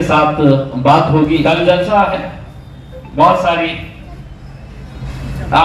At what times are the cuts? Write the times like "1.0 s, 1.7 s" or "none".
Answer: 1.4 s